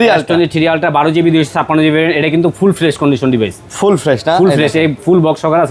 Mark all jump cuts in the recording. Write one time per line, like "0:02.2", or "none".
none